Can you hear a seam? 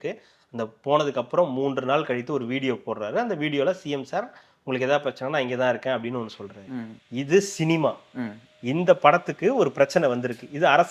no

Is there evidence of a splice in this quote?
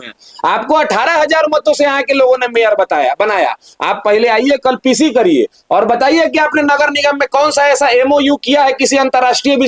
no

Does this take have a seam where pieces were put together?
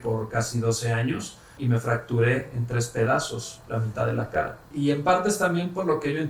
yes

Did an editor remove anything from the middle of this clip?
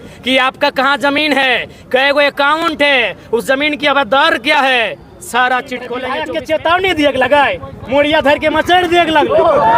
yes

